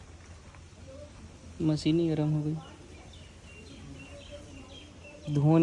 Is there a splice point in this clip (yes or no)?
no